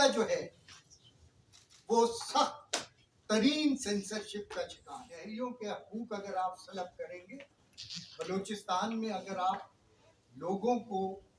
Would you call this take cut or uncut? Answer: cut